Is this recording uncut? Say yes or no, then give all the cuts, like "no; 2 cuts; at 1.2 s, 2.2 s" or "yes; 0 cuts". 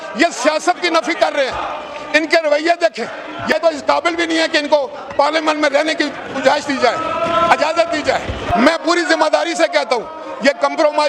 no; 2 cuts; at 3.5 s, 8.5 s